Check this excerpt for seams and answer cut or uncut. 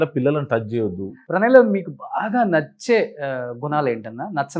cut